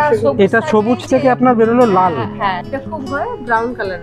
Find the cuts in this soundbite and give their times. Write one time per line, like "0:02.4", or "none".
0:02.6